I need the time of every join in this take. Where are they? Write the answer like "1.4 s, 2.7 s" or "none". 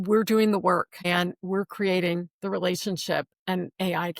0.9 s